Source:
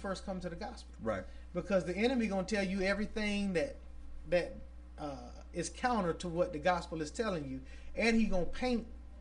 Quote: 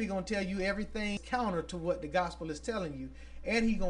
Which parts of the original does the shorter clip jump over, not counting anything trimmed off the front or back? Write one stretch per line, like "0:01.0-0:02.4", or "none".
0:03.4-0:05.7

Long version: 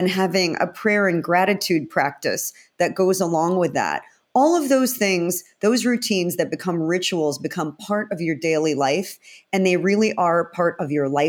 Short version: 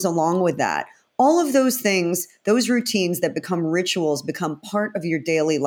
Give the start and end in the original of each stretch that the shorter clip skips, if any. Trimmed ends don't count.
none

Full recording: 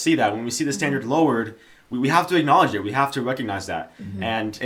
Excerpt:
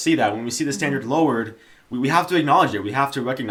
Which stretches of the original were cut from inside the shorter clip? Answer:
none

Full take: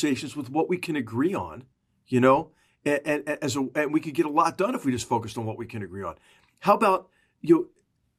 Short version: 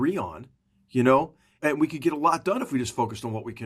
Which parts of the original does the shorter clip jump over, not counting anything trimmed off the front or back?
0:02.7-0:03.7

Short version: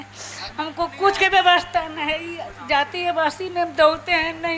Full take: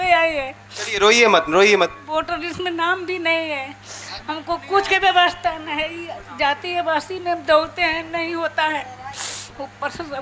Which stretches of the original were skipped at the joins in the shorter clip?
none

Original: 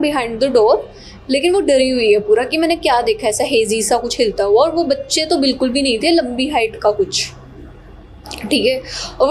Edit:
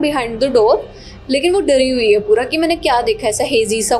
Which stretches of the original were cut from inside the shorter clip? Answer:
none

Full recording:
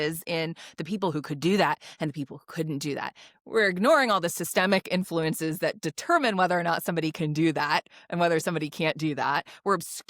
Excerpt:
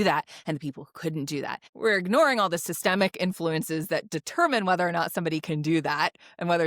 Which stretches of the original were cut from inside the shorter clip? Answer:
0:03.2-0:03.4

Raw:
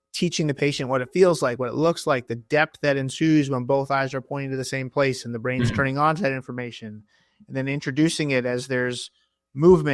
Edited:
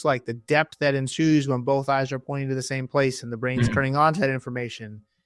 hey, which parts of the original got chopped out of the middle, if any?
none

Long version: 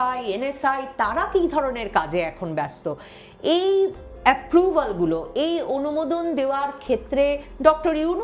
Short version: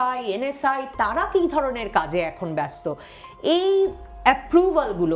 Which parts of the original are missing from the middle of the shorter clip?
none

